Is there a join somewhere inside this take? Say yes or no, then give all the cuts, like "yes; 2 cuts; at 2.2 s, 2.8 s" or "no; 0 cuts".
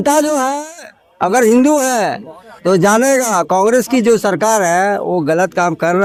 no; 0 cuts